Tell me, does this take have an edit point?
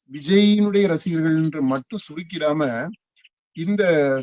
no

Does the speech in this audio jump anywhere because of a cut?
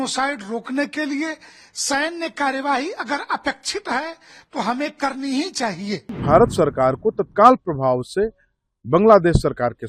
yes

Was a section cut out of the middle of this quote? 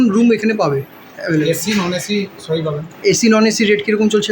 no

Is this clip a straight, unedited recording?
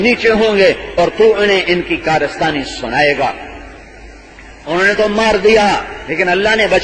yes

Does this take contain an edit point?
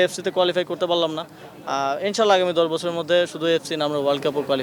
no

